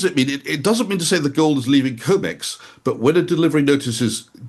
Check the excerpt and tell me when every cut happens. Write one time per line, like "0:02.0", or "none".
none